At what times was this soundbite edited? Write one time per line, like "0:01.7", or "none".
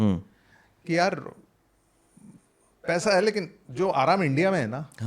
none